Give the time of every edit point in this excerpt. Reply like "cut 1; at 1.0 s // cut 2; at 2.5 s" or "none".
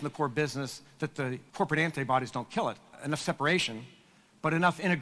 cut 1; at 1.4 s // cut 2; at 2.9 s